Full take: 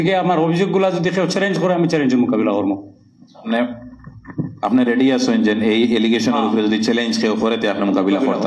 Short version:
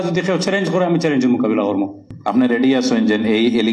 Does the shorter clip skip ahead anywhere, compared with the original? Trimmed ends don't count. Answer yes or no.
yes